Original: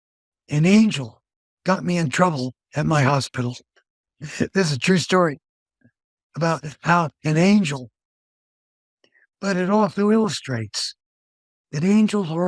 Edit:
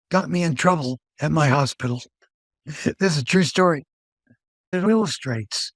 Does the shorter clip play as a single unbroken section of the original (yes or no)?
no